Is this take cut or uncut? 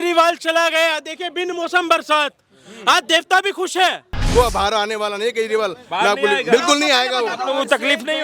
cut